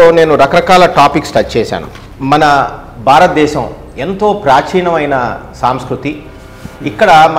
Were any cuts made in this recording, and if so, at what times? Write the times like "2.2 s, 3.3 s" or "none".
none